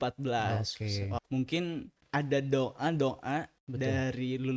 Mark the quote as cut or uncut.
cut